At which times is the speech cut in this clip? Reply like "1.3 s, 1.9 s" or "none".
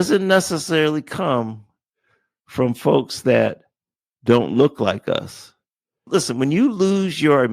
6.1 s